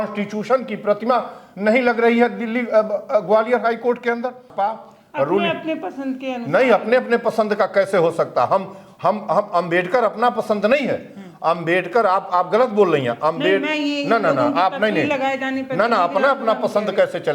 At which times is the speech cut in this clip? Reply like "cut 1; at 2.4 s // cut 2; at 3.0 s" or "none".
cut 1; at 4.5 s